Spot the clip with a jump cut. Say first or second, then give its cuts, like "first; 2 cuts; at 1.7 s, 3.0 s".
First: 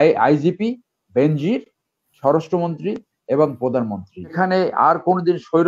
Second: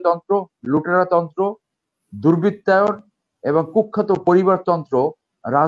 first; 1 cut; at 4.3 s